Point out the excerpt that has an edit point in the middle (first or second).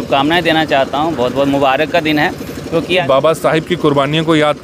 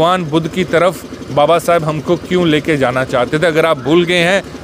first